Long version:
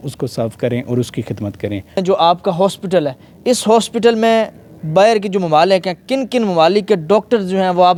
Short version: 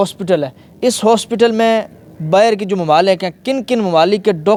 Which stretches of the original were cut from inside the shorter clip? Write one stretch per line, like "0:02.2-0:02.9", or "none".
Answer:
none